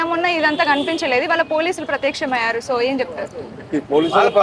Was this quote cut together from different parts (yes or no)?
no